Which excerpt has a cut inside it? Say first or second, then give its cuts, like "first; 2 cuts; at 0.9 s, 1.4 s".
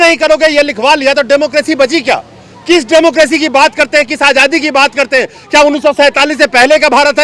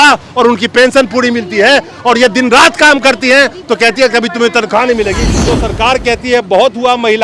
second; 1 cut; at 5.5 s